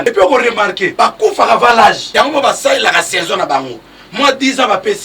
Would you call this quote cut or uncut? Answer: cut